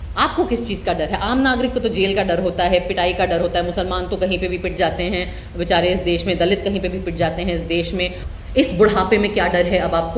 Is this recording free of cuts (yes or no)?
no